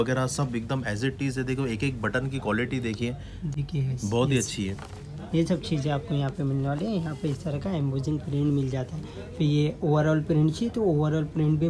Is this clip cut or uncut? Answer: uncut